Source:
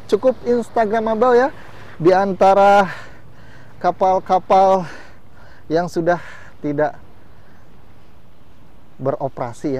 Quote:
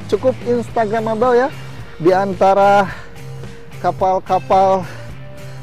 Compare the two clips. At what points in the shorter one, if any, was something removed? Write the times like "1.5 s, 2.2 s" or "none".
none